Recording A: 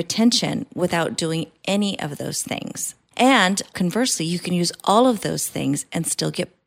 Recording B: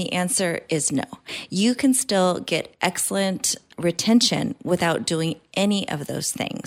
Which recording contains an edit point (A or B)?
A